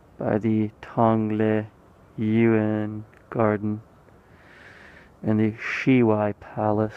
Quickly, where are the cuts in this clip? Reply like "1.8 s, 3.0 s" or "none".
5.1 s